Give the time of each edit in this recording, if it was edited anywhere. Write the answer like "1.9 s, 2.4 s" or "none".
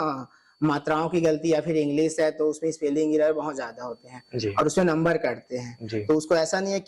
none